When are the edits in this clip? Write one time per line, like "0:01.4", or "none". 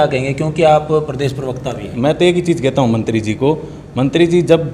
0:01.9